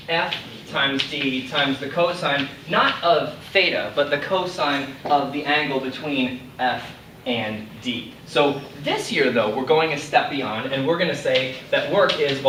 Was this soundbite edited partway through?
no; 0 cuts

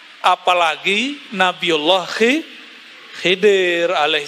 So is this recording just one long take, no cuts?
yes; 0 cuts

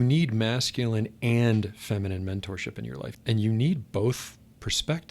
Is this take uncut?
no; 1 cut; at 3.1 s

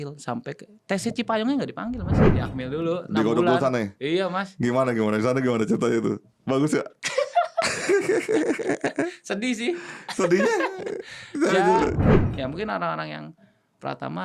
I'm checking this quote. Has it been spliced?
yes; 2 cuts; at 2.2 s, 12.2 s

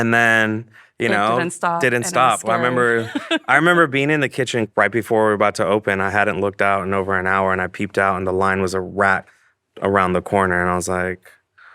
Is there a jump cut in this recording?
yes; 1 cut; at 4.7 s

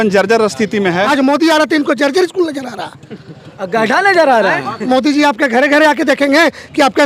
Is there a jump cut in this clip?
yes; 2 cuts; at 1.1 s, 4.7 s

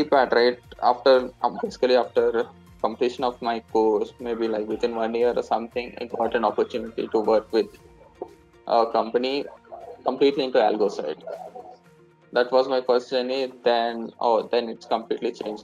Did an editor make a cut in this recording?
no; 0 cuts

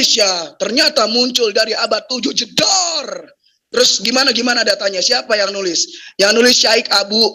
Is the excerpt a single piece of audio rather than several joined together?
yes; 0 cuts

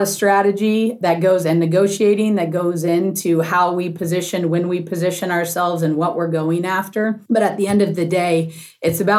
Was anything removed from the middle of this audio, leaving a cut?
yes; 1 cut; at 1.0 s

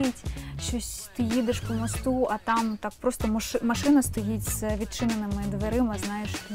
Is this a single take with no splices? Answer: yes; 0 cuts

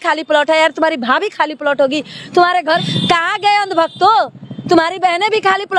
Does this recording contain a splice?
yes; 1 cut; at 2.9 s

